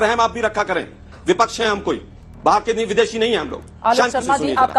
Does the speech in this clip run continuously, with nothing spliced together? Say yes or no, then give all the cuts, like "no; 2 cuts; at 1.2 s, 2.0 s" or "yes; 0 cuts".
yes; 0 cuts